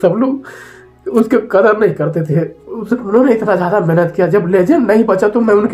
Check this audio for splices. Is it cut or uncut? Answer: uncut